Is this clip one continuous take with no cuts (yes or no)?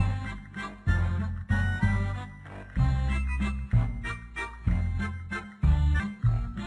yes